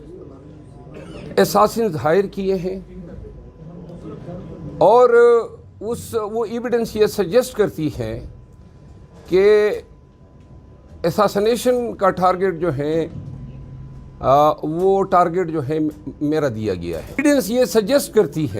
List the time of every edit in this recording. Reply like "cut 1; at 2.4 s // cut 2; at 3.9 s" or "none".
cut 1; at 17.2 s